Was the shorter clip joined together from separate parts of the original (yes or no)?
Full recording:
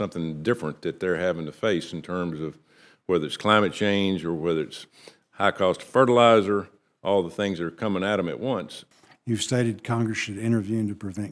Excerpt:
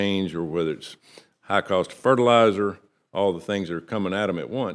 no